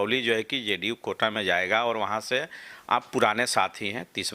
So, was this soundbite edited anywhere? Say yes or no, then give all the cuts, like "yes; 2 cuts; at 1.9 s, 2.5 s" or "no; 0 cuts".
no; 0 cuts